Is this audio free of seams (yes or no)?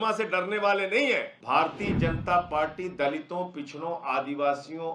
no